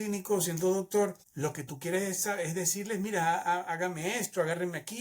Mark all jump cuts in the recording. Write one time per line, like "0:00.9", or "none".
0:01.2